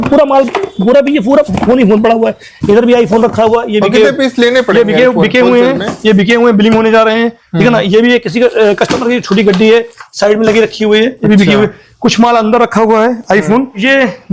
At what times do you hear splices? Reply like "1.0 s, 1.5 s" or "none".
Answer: none